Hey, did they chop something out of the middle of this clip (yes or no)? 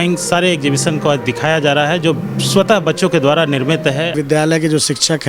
yes